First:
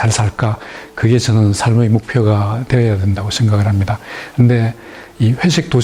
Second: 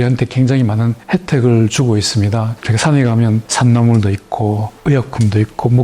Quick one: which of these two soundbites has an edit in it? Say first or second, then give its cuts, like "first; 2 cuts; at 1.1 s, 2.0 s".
second; 4 cuts; at 1.0 s, 2.6 s, 3.5 s, 4.7 s